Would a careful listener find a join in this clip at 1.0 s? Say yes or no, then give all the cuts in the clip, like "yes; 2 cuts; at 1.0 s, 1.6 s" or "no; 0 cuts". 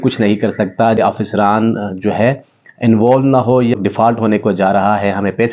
yes; 2 cuts; at 1.0 s, 3.7 s